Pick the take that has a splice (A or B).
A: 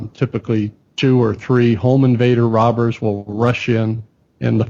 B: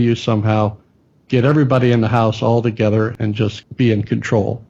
B